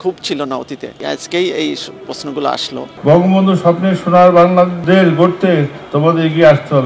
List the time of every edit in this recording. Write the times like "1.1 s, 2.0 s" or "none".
2.9 s, 4.8 s